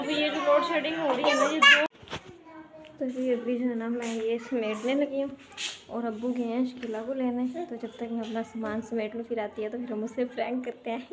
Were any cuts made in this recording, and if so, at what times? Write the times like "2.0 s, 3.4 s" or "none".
1.9 s